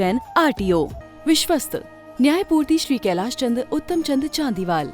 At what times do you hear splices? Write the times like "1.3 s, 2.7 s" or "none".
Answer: 1.0 s

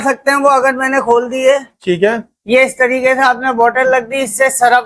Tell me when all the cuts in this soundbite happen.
none

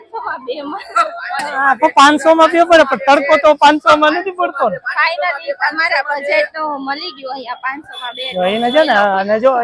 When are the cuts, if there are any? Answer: none

